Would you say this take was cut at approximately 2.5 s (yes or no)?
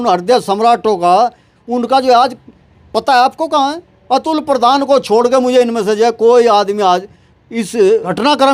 no